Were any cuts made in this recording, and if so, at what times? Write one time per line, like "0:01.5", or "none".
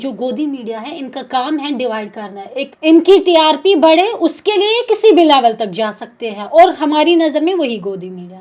0:02.6